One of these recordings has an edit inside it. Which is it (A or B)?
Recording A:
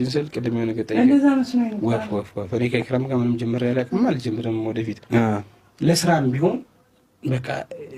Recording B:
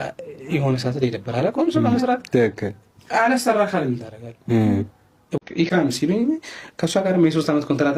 B